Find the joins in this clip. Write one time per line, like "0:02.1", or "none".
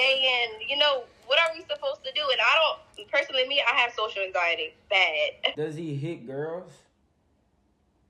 0:05.5